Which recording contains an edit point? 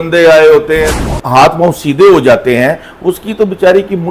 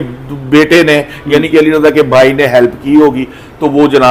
first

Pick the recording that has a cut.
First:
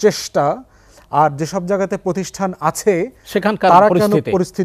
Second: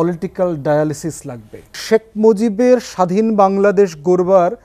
second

